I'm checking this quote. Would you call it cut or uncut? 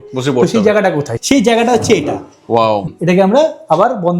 cut